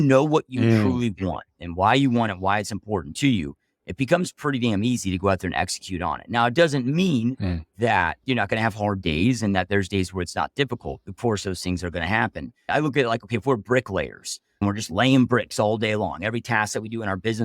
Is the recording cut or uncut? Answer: cut